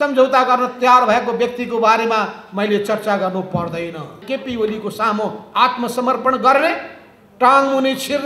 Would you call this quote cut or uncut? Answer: cut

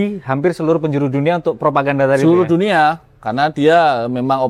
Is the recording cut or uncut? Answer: uncut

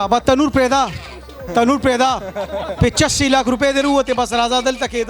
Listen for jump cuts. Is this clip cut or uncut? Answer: uncut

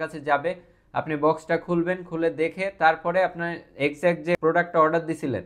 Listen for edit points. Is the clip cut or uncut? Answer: cut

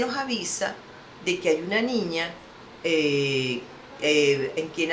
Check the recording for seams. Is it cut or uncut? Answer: uncut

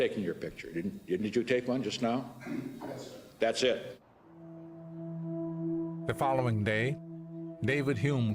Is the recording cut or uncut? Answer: uncut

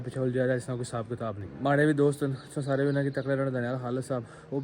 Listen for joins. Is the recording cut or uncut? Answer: cut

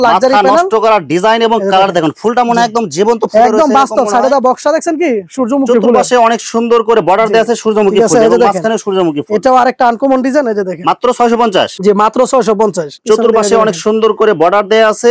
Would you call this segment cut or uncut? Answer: uncut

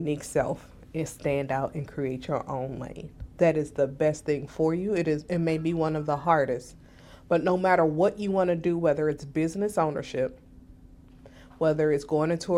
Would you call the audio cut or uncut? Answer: uncut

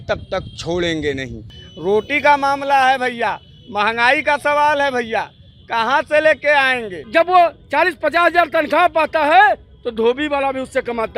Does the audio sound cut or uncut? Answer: cut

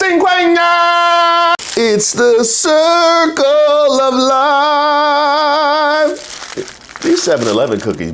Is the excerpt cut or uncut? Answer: cut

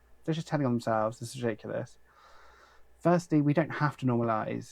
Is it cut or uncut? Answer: uncut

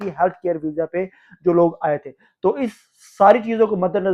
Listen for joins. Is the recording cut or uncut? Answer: uncut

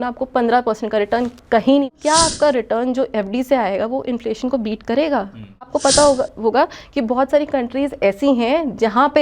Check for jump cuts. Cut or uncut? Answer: cut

